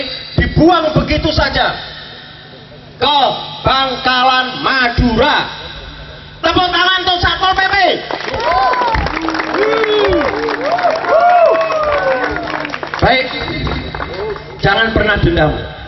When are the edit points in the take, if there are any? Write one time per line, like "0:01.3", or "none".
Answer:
none